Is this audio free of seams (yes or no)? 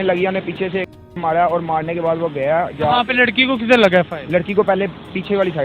yes